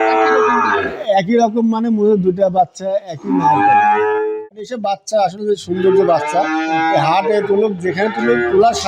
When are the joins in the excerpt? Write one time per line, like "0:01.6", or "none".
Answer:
0:04.2